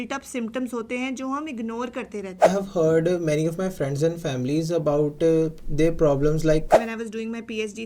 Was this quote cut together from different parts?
yes; 2 cuts; at 2.5 s, 6.7 s

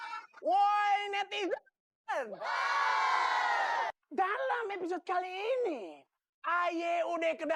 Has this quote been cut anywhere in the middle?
no; 0 cuts

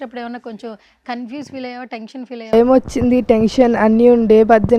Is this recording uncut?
no; 1 cut; at 2.5 s

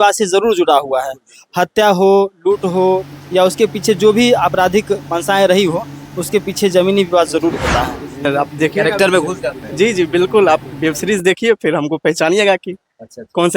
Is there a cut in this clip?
yes; 1 cut; at 8.2 s

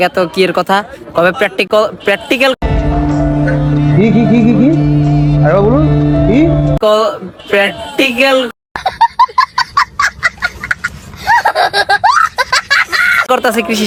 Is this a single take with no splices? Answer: yes; 0 cuts

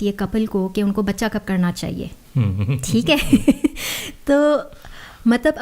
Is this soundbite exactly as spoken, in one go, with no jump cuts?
yes; 0 cuts

